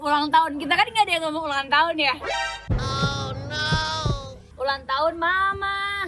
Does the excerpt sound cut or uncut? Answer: cut